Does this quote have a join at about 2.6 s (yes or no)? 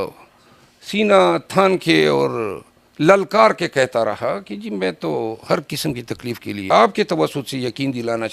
no